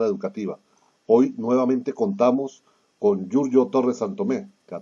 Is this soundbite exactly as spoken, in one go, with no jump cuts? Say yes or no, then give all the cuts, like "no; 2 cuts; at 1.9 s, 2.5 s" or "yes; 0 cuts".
no; 1 cut; at 3.5 s